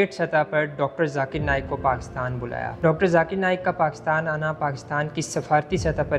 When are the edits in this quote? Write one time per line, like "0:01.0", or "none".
none